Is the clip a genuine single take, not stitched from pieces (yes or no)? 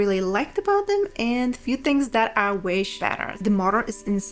no